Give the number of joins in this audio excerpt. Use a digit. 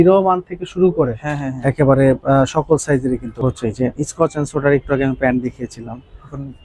1